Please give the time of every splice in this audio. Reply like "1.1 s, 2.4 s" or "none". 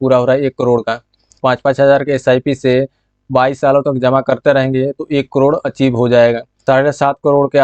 1.3 s, 6.6 s